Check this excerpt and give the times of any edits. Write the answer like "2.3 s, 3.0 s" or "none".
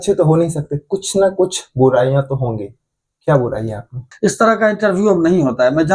4.1 s